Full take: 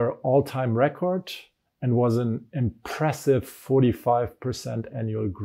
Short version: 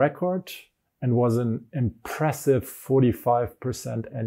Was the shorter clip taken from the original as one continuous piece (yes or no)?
yes